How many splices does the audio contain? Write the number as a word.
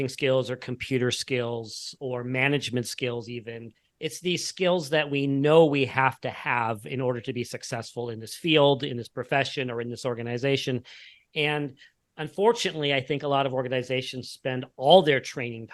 zero